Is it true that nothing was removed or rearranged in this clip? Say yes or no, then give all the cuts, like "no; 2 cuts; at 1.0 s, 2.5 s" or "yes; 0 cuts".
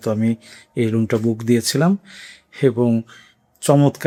yes; 0 cuts